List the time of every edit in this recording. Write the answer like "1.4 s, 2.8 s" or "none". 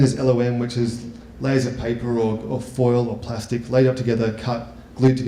2.4 s